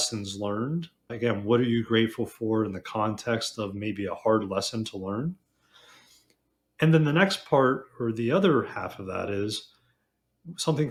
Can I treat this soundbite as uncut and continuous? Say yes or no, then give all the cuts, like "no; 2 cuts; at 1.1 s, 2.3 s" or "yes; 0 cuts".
yes; 0 cuts